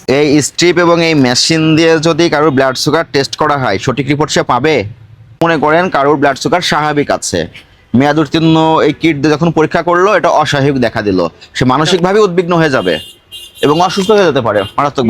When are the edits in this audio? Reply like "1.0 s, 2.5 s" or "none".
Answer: 5.4 s

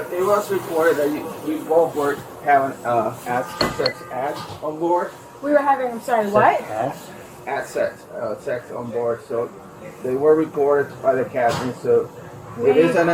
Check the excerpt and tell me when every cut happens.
none

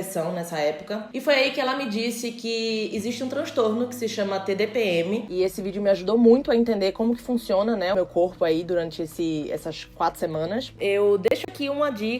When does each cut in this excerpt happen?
1.1 s, 5.3 s, 7.9 s, 10.7 s

